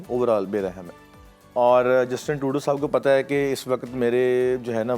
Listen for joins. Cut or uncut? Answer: uncut